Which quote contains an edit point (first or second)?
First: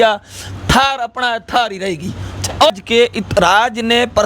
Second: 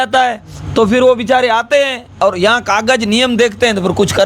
first